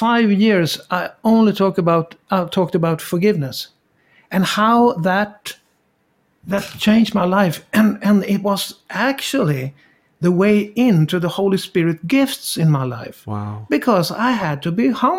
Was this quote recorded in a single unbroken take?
yes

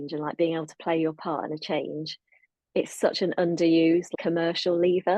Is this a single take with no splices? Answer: no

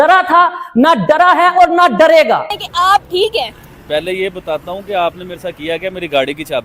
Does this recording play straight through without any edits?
no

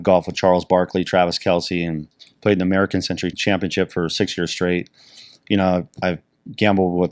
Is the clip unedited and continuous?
no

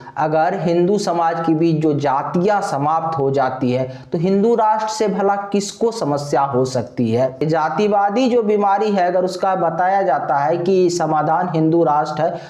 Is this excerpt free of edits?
no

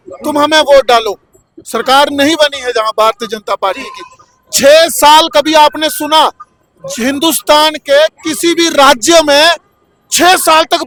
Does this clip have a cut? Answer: no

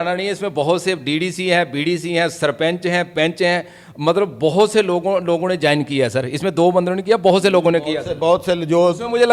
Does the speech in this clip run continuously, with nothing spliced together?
yes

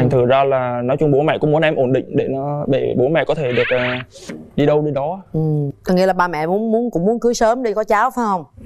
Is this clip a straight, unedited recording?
yes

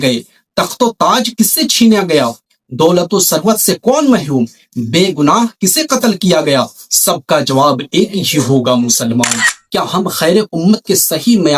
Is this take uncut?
no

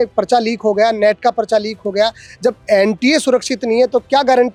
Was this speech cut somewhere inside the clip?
no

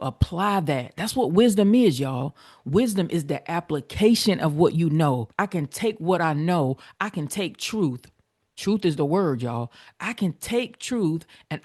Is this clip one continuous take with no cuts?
no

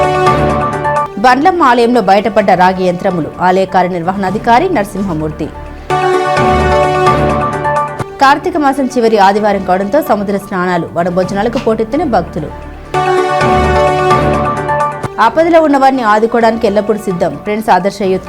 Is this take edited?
yes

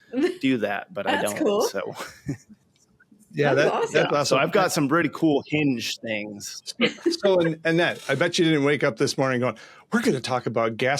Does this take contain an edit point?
yes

